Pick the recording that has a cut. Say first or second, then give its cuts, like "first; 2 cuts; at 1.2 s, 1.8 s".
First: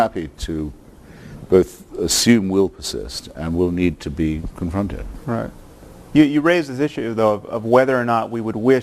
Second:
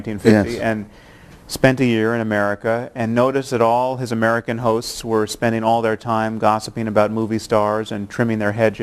first; 1 cut; at 7.1 s